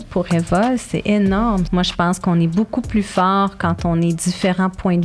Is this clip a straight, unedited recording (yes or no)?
no